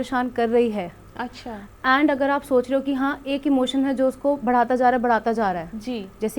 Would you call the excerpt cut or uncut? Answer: uncut